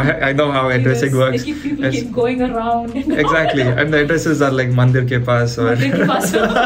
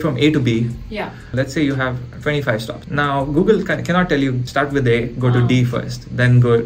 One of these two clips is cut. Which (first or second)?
second